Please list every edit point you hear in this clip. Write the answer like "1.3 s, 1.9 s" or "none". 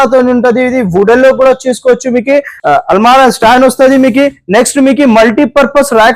2.5 s